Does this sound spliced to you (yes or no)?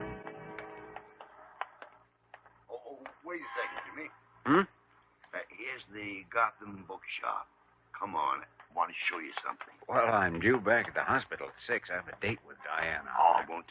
yes